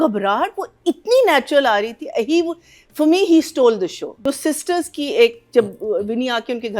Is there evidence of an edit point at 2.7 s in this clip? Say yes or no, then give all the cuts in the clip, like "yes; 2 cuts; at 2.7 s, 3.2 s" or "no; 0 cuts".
no; 1 cut; at 4.1 s